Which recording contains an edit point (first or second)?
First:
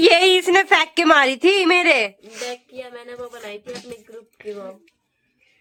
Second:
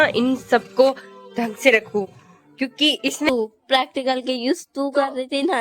second